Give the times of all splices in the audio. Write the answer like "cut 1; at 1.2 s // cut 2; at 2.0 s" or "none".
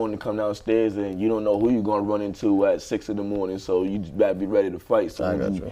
none